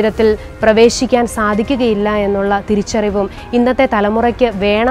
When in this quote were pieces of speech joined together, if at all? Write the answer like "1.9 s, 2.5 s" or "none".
none